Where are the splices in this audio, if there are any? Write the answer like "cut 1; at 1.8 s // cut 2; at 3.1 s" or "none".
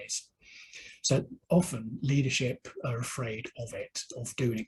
none